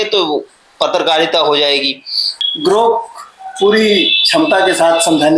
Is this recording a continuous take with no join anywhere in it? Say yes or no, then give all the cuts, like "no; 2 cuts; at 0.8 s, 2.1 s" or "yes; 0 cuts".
no; 1 cut; at 2.3 s